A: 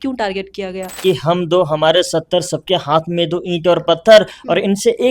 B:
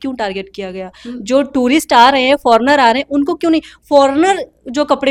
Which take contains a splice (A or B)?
A